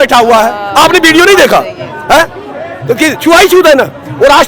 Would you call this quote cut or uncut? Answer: uncut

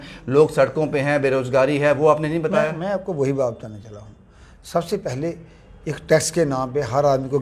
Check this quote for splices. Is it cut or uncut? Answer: uncut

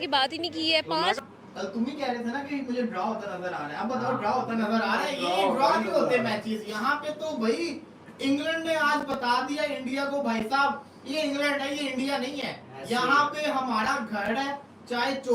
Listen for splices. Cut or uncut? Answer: cut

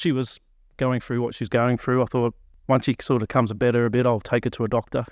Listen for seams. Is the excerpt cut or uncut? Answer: cut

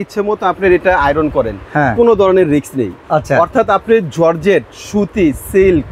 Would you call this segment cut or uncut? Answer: uncut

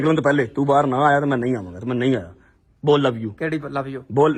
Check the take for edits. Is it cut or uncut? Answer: uncut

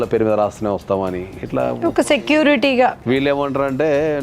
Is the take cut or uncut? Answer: cut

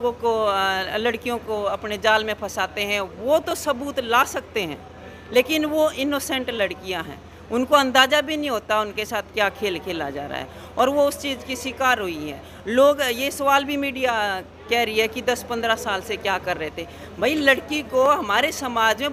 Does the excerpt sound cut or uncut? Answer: uncut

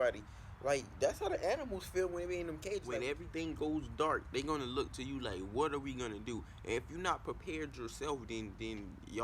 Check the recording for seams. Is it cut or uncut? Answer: cut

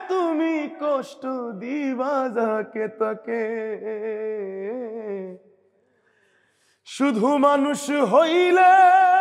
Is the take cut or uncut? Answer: uncut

